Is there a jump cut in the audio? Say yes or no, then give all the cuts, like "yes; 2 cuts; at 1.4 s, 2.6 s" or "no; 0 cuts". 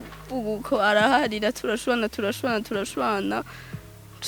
no; 0 cuts